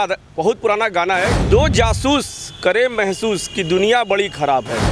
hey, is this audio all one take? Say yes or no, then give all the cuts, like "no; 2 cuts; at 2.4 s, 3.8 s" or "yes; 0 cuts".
no; 1 cut; at 1.4 s